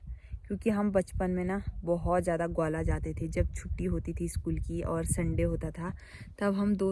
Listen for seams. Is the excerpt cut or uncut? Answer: uncut